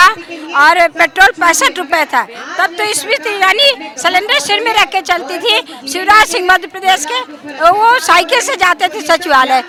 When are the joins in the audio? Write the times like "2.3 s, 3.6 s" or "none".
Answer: none